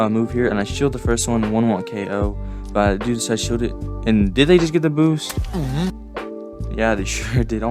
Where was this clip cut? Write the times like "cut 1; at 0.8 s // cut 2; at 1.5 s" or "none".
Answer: none